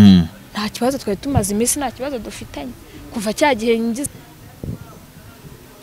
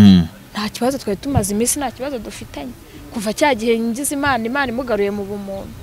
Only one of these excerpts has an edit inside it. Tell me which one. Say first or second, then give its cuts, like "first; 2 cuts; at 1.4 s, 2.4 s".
first; 1 cut; at 4.1 s